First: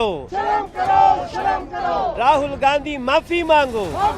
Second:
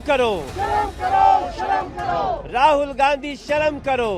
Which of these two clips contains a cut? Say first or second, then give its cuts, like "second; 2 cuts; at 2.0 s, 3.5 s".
first; 1 cut; at 2.2 s